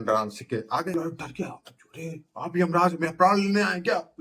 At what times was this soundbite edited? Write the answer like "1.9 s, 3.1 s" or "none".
0.9 s